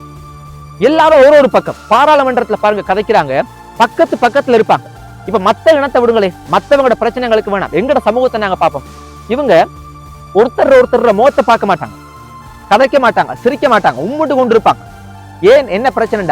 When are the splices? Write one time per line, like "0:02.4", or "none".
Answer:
none